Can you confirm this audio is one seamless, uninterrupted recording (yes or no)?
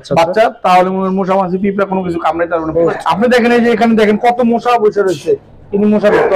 no